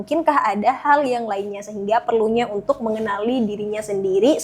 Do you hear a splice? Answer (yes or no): no